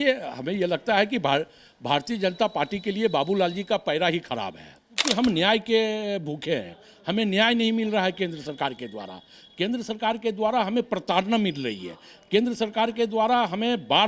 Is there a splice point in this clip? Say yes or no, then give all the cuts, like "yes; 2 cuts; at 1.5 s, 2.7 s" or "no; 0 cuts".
yes; 1 cut; at 5.1 s